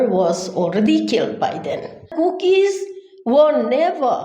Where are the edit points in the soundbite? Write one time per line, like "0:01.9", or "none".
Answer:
0:02.1